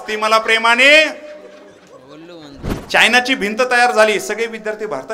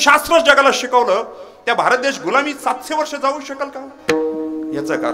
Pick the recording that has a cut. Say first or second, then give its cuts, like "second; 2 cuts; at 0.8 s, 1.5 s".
first; 1 cut; at 2.7 s